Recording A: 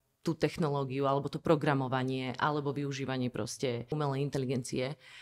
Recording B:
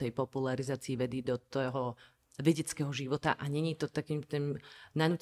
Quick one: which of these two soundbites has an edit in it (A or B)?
A